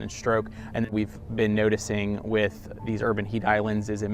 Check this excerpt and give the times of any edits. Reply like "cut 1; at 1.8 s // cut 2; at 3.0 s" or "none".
cut 1; at 0.9 s